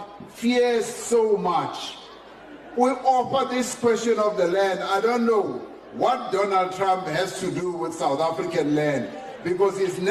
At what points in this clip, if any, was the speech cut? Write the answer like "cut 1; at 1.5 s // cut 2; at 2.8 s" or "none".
none